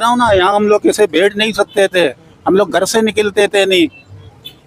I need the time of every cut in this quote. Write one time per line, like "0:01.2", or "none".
none